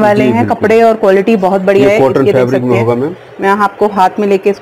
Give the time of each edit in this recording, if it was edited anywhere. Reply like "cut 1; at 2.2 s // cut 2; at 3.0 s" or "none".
none